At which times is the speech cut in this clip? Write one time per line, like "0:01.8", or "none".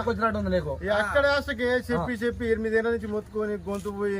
none

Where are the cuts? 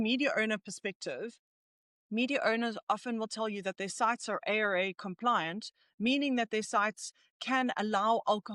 none

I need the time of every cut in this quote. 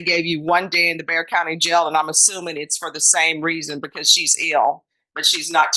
none

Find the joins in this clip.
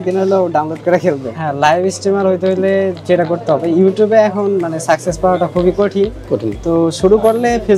0:01.3

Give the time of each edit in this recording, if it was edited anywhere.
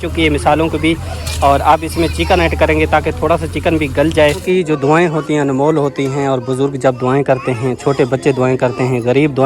0:04.4

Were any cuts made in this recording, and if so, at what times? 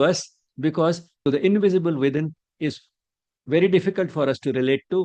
0:01.1

